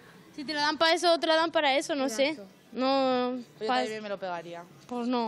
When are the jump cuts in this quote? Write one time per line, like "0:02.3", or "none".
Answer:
none